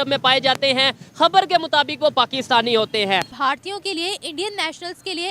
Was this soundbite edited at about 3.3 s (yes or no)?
yes